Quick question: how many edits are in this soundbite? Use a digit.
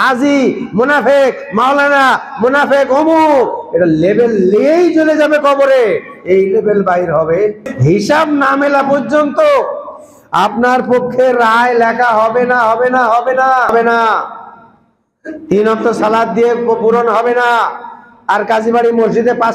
2